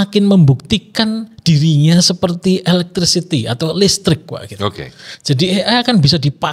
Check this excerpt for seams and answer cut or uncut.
uncut